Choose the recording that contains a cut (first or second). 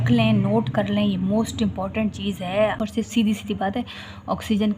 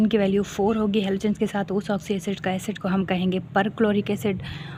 first